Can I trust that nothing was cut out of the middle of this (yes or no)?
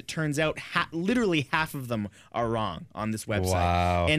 yes